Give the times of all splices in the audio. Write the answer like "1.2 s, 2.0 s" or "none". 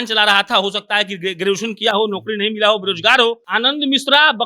3.4 s